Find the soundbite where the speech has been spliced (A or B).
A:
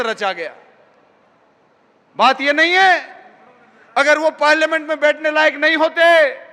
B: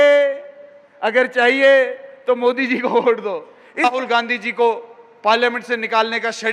B